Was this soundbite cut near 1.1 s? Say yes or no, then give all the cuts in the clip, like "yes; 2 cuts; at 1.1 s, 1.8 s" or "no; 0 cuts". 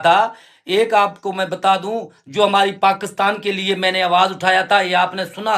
no; 0 cuts